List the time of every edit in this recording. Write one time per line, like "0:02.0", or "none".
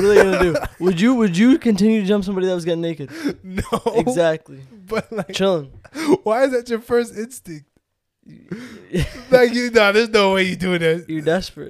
none